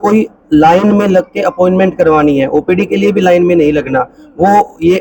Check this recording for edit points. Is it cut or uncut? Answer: uncut